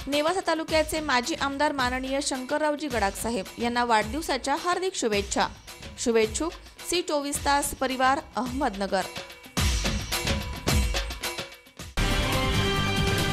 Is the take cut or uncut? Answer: cut